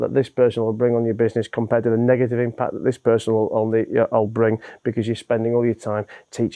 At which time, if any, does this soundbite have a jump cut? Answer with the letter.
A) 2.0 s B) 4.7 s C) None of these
C